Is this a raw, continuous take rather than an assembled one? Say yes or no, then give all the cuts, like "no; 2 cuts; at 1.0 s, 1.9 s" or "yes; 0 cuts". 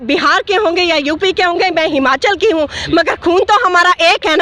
yes; 0 cuts